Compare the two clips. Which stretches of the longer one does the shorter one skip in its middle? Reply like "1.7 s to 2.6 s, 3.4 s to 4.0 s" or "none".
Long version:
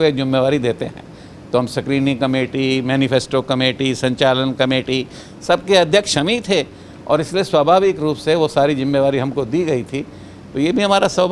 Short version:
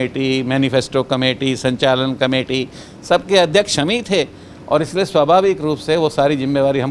none

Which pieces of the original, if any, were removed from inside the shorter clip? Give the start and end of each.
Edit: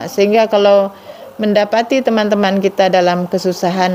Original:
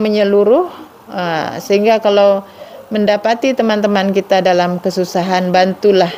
none

